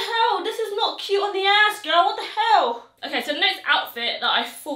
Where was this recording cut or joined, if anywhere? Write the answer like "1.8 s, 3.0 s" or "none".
none